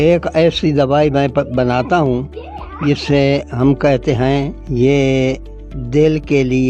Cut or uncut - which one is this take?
cut